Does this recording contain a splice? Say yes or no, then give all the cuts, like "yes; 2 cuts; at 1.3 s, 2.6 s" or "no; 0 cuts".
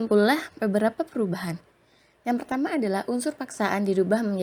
no; 0 cuts